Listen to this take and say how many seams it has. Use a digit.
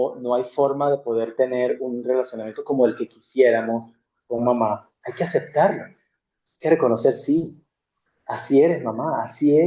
0